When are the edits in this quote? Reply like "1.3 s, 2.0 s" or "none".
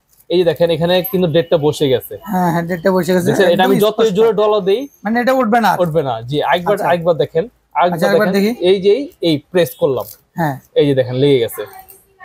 none